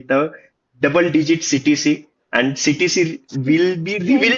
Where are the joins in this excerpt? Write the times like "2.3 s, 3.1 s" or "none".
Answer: none

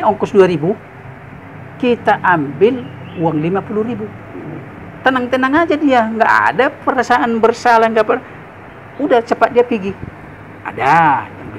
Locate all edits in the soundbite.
none

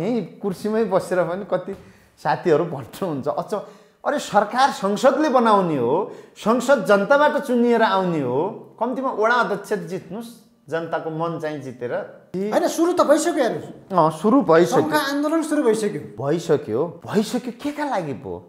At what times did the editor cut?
12.2 s, 16.1 s, 17.0 s

